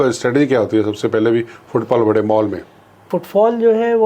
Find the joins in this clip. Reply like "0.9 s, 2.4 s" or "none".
3.1 s